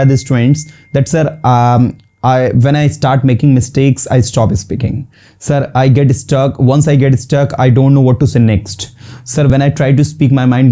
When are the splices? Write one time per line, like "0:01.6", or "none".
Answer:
0:09.5